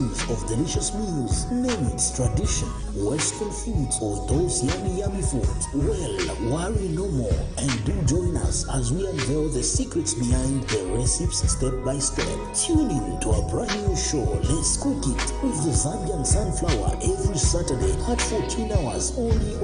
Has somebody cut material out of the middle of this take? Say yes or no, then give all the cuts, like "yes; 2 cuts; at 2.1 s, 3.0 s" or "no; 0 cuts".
no; 0 cuts